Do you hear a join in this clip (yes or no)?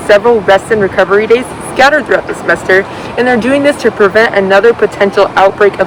no